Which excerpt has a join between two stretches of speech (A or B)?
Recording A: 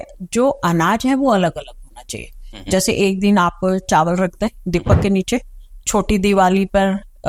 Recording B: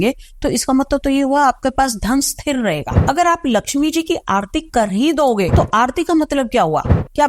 B